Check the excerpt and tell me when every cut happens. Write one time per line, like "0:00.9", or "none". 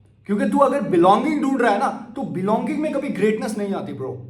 none

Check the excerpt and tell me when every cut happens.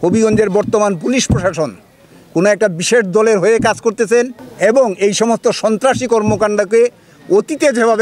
none

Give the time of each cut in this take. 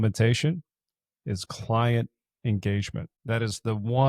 0:03.1

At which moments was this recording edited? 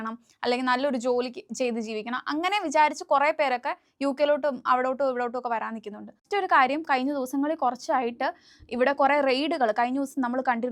0:06.2

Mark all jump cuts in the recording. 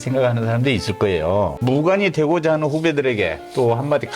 0:01.6

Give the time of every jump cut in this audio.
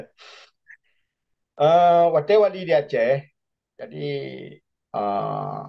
none

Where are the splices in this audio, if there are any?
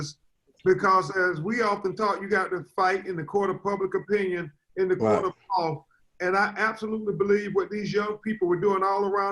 none

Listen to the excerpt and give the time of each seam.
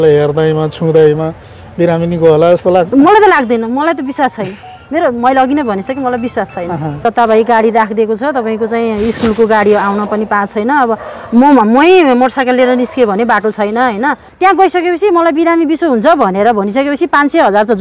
0:07.0
0:14.3

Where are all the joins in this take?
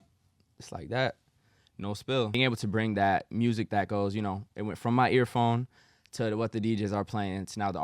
0:02.4

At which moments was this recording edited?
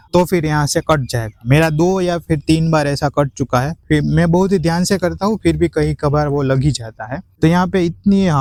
none

